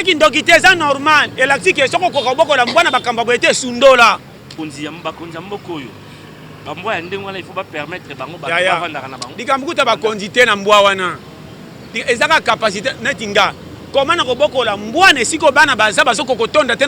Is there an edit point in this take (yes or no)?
yes